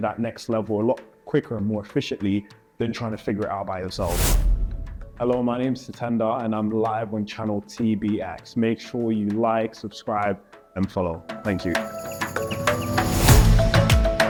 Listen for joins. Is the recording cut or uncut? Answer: uncut